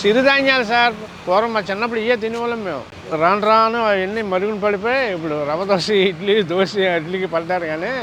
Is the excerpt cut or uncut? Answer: uncut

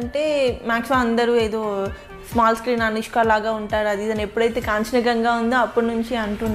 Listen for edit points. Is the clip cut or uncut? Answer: uncut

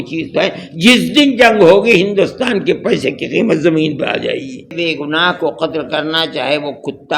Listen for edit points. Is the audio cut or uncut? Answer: cut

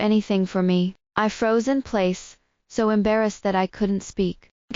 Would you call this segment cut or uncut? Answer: cut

